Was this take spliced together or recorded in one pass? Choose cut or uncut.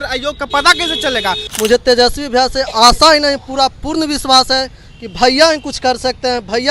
cut